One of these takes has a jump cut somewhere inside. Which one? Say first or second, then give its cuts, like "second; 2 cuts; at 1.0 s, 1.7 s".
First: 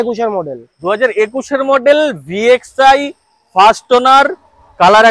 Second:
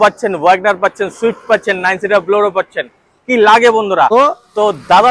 second; 1 cut; at 4.1 s